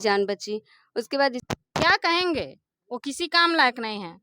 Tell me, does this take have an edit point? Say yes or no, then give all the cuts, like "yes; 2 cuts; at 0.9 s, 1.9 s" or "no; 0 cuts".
yes; 1 cut; at 1.4 s